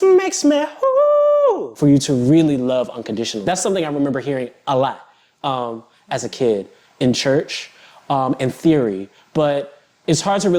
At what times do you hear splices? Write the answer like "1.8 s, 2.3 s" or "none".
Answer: 1.7 s, 3.4 s